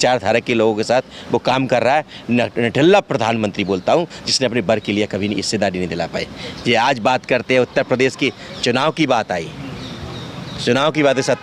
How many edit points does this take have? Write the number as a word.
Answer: zero